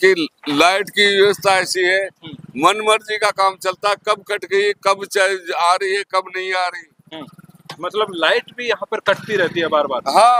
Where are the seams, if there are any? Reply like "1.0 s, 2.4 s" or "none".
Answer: none

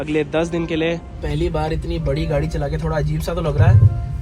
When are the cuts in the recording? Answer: 1.1 s

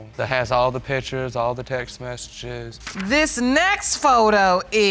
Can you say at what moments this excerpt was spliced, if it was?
2.6 s

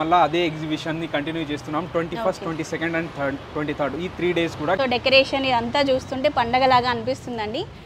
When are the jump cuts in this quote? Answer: 4.8 s

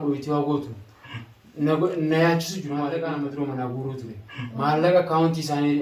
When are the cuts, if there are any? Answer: 2.9 s

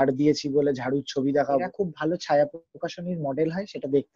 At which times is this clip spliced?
1.7 s

